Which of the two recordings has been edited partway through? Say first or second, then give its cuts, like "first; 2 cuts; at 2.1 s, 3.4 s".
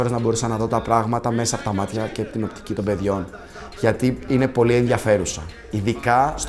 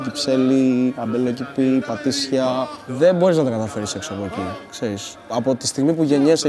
second; 2 cuts; at 2.8 s, 5.3 s